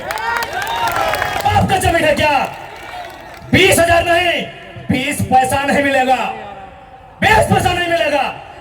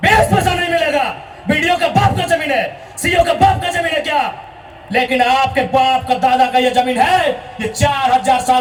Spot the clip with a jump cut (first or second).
first